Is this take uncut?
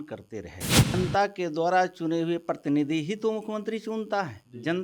no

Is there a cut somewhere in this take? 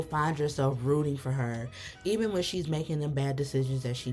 no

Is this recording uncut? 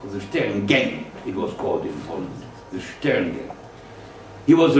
yes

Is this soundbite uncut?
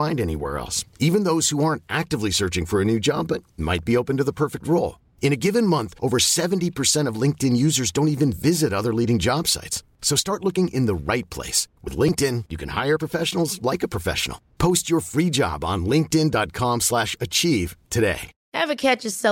no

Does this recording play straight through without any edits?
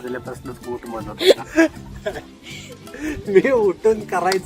no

